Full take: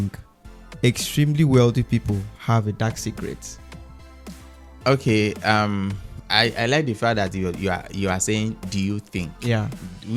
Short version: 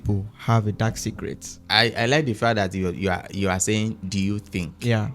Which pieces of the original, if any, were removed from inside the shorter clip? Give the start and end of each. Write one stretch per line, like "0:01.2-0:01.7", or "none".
0:03.5-0:06.1